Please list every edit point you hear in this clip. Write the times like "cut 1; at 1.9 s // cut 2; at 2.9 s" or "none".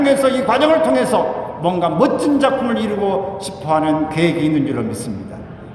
none